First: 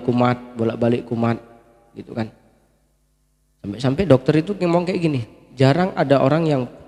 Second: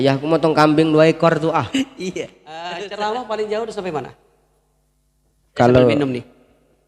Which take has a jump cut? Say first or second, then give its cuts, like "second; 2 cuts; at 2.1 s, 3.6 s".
second; 1 cut; at 2.8 s